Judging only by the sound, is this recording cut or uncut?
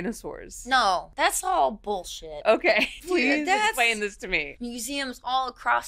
cut